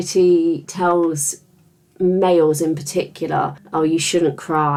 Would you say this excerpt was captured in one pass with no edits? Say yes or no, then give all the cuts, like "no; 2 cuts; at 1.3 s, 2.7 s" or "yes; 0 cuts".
yes; 0 cuts